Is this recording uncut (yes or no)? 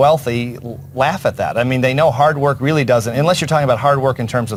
yes